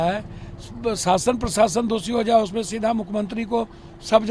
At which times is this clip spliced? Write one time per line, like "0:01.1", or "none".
none

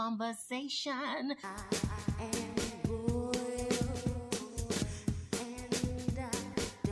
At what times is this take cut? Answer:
0:01.2

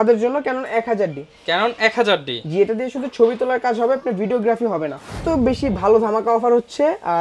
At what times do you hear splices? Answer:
0:05.2

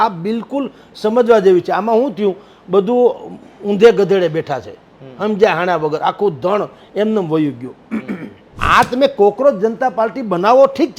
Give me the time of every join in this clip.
0:08.6

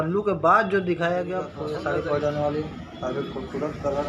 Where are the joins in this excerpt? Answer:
0:01.5

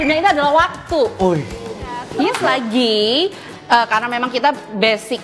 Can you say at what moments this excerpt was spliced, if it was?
0:02.3

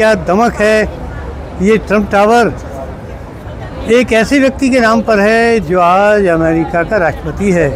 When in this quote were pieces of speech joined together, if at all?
none

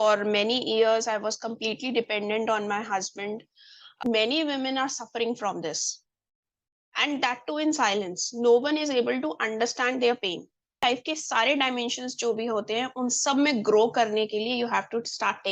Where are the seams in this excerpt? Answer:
0:04.0
0:10.8

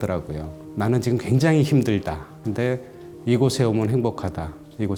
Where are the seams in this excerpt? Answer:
none

